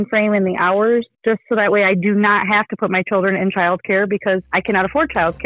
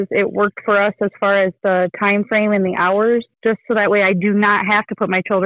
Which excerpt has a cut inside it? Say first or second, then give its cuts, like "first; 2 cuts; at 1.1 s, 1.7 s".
first; 1 cut; at 4.5 s